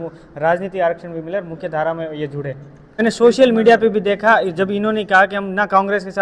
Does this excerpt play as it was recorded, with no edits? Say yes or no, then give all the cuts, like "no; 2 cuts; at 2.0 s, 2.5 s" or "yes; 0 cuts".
no; 1 cut; at 3.0 s